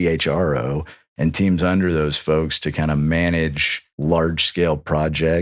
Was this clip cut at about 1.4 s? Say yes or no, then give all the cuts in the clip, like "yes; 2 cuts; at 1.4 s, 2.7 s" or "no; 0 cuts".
no; 1 cut; at 3.8 s